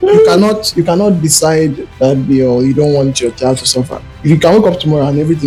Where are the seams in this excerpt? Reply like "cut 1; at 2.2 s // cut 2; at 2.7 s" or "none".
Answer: none